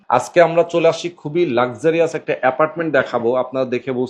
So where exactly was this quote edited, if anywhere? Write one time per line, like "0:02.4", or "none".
none

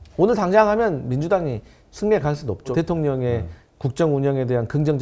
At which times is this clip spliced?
0:02.7

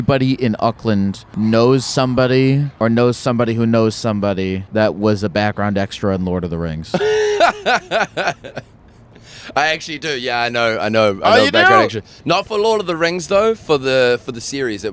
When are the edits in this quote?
0:01.2
0:02.7
0:04.6

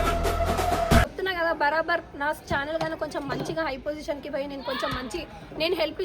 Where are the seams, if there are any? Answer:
0:01.1

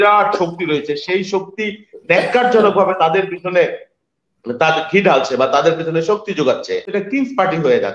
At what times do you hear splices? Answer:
0:07.0

